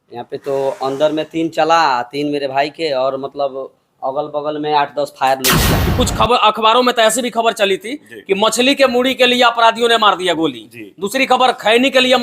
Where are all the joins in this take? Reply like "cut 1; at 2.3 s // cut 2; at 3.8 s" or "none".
cut 1; at 5.7 s